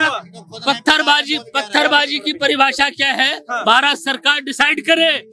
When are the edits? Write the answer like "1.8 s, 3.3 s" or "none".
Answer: none